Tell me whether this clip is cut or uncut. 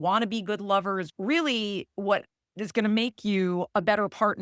cut